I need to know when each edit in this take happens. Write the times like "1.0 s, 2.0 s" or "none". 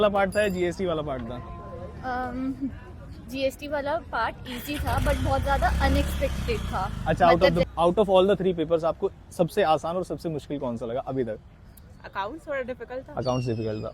7.6 s